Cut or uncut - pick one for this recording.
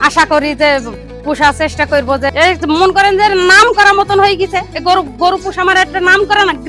cut